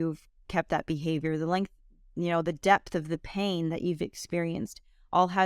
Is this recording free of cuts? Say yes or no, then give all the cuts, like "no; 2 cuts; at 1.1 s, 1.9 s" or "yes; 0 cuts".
yes; 0 cuts